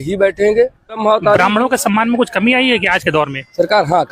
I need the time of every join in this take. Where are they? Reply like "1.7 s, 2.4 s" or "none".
1.0 s

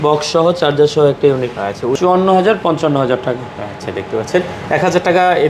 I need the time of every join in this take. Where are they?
1.9 s

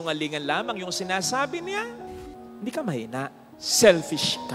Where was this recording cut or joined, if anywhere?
2.1 s

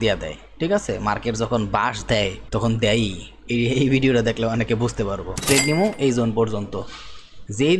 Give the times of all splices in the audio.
2.4 s, 5.4 s

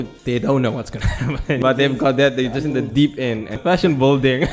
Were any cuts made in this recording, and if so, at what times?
1.6 s, 3.6 s

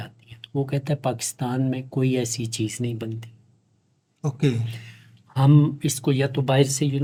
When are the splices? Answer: none

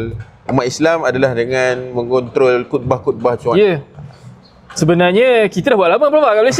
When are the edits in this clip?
none

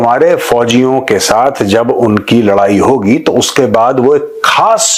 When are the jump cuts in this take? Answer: none

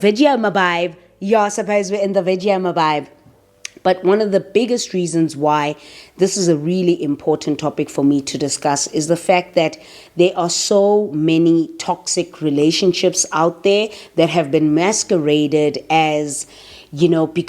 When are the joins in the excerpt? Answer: none

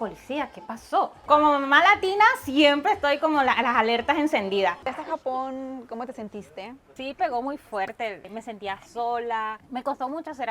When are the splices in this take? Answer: 1.2 s, 5.0 s, 6.9 s, 9.6 s

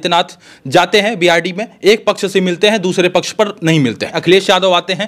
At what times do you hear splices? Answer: 4.1 s

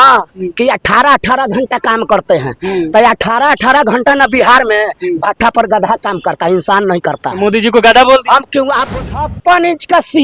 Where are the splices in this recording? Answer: 8.9 s

